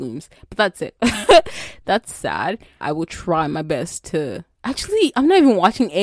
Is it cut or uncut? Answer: cut